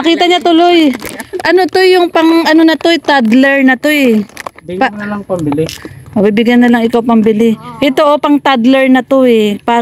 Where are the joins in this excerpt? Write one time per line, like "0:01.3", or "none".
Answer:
none

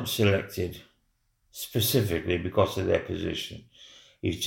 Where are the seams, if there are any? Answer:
none

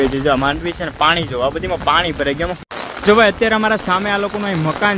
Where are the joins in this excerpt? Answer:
0:02.6

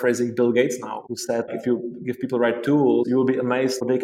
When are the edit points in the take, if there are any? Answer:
0:03.1

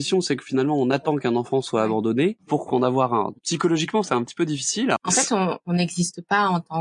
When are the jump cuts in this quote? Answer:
0:02.4
0:03.3
0:05.0

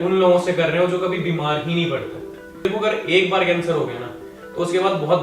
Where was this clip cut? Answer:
0:02.6

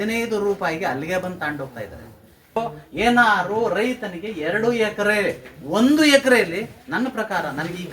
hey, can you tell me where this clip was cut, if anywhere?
0:02.6

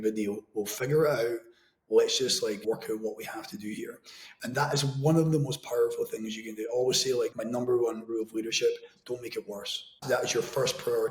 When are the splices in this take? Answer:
0:01.7
0:10.0

